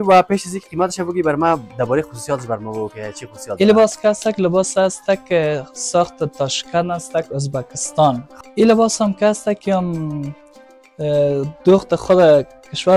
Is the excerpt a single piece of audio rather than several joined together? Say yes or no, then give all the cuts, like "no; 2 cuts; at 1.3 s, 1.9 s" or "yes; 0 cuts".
no; 1 cut; at 8.3 s